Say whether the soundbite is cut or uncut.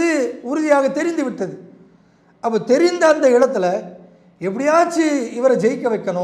uncut